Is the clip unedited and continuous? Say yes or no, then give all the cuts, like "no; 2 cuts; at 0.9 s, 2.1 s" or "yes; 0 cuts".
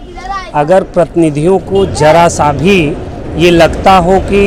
yes; 0 cuts